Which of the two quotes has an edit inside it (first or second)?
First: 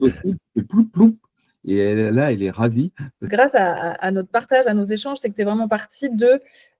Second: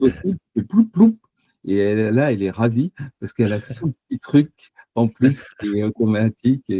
first